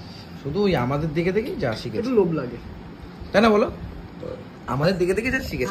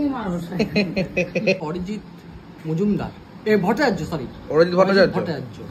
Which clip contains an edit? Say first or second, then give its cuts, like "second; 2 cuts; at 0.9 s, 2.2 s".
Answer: second; 1 cut; at 1.6 s